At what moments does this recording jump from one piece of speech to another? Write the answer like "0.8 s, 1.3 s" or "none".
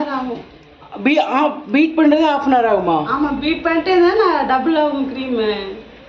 none

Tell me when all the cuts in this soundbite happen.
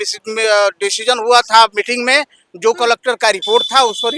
none

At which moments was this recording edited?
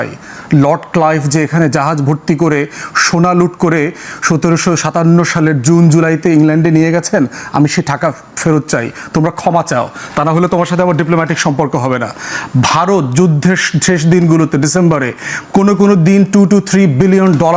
none

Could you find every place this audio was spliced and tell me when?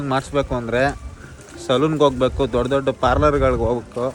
none

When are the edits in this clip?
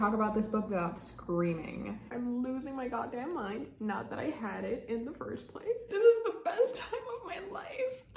2.1 s, 5.8 s

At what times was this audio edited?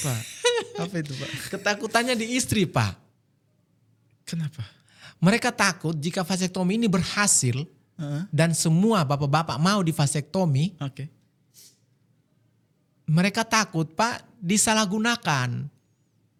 none

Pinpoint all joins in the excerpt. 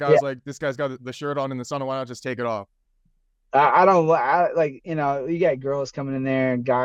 none

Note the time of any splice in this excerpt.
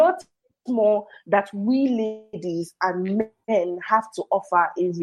3.4 s

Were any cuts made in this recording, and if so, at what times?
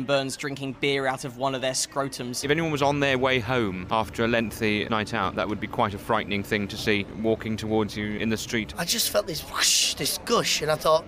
2.4 s, 3.8 s, 4.9 s, 7.1 s, 8.7 s

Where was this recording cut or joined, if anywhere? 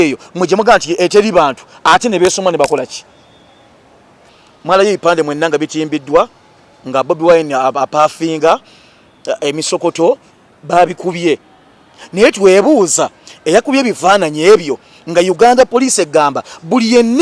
4.4 s

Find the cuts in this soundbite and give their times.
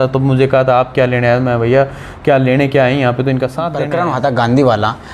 3.7 s

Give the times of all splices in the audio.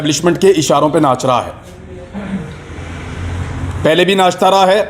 none

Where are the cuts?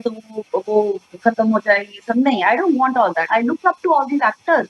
3.3 s

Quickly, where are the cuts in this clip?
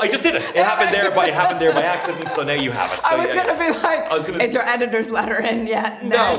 none

